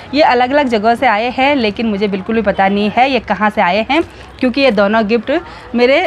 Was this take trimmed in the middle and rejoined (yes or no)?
no